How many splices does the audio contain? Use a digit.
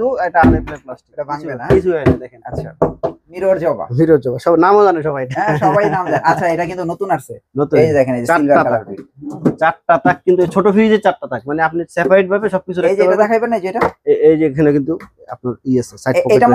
1